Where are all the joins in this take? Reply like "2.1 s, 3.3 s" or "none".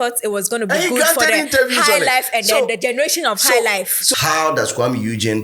4.0 s